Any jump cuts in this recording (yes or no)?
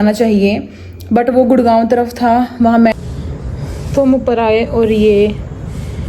yes